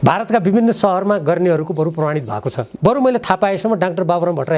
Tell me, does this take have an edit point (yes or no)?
yes